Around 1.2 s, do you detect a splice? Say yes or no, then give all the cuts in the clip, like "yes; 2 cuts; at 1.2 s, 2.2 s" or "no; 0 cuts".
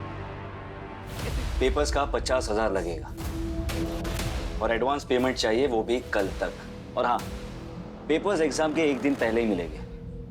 yes; 1 cut; at 1.2 s